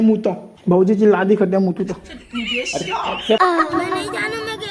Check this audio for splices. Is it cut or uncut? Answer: cut